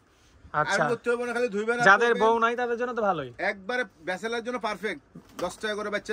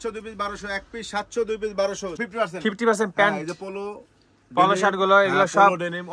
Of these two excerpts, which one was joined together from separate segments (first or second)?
second